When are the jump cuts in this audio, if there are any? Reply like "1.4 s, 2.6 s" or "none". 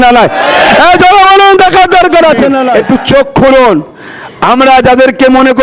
2.7 s